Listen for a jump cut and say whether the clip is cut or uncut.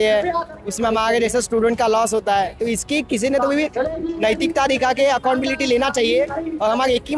uncut